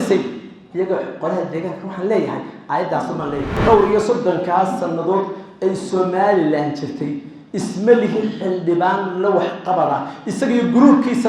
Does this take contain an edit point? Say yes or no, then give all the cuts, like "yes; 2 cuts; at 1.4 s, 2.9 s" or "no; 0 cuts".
yes; 1 cut; at 3.6 s